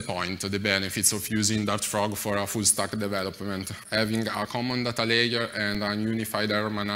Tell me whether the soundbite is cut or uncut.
cut